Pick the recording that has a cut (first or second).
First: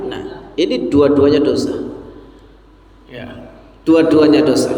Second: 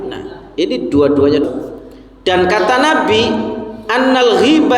second